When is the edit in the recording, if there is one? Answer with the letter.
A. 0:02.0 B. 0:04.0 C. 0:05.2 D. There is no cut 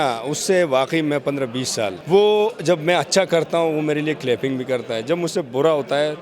A